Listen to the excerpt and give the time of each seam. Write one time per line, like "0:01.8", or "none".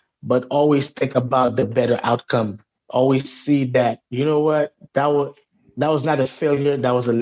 0:02.7